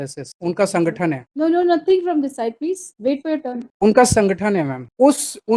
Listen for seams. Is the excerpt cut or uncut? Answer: uncut